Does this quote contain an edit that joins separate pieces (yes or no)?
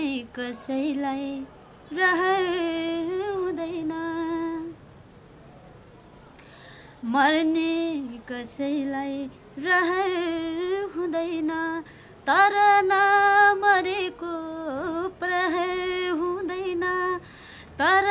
no